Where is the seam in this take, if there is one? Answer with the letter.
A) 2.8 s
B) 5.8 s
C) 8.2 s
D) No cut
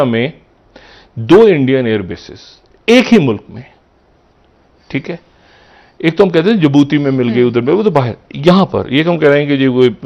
D